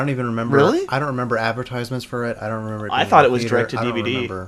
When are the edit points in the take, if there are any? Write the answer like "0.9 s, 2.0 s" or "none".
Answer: 2.9 s